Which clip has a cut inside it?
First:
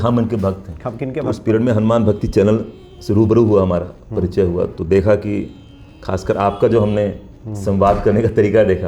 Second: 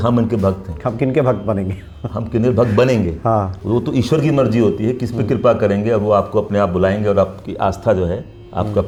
first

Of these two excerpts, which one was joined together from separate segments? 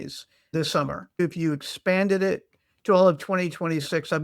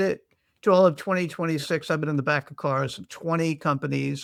first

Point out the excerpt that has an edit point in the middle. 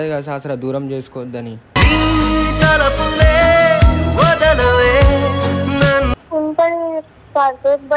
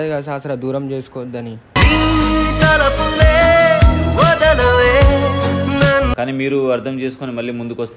second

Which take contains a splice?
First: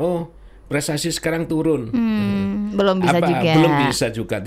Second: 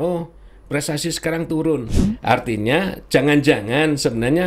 second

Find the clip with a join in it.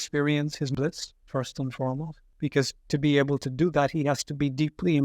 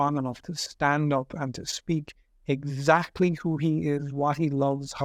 first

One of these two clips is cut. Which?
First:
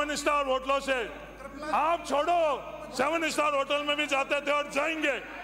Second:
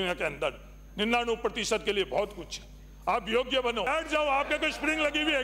second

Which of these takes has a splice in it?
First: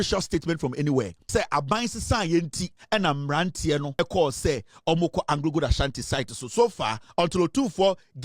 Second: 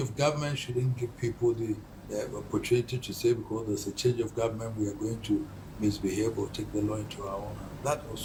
first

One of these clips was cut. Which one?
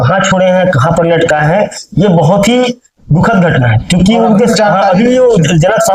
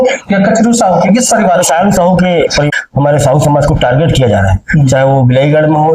second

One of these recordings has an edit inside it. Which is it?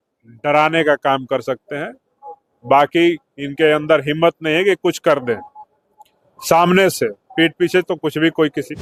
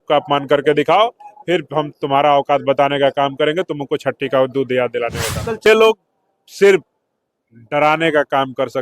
second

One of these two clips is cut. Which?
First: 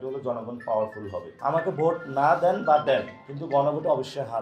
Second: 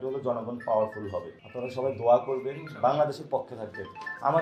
first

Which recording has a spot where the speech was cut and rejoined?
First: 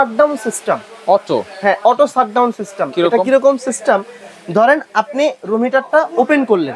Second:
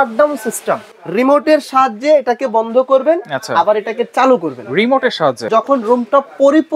second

